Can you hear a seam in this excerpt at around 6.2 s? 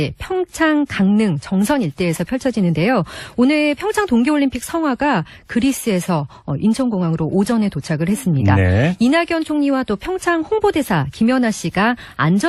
no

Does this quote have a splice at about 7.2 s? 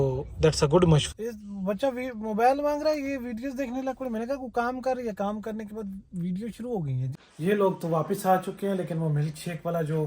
yes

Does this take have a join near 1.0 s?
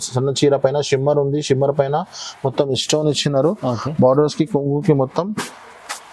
no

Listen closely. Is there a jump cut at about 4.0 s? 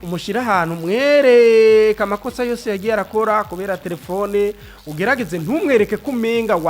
no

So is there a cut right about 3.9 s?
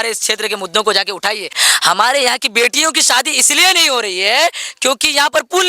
no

